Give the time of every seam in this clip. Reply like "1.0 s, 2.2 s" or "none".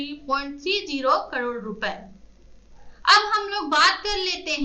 none